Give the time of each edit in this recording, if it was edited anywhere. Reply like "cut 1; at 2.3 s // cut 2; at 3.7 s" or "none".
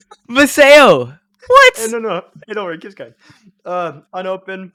none